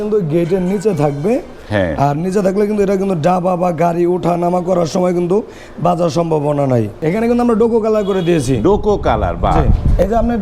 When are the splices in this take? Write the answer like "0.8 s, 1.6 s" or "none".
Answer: 7.0 s